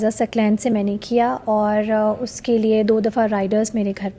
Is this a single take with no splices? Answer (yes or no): yes